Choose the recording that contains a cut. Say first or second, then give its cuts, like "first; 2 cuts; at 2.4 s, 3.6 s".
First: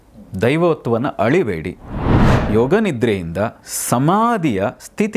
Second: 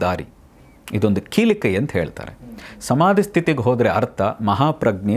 first; 1 cut; at 2.3 s